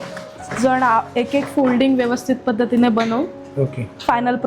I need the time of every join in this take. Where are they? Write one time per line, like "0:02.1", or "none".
none

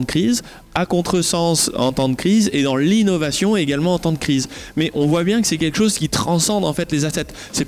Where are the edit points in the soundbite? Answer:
none

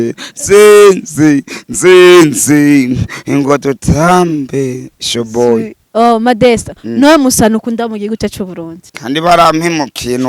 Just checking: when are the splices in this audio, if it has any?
0:05.8
0:08.8

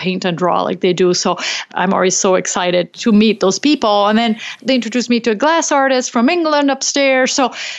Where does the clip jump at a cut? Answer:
0:01.6
0:02.9
0:04.6

